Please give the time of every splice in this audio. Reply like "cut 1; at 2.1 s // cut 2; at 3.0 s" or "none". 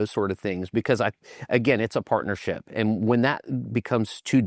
none